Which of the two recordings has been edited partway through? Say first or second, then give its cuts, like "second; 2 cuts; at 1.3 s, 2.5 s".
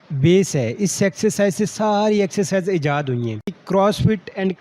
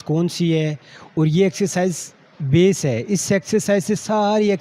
first; 1 cut; at 3.5 s